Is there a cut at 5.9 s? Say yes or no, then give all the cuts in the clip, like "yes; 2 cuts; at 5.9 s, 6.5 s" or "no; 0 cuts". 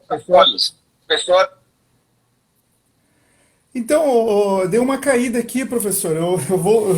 no; 1 cut; at 4.0 s